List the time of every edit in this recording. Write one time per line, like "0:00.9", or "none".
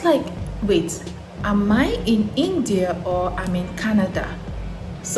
none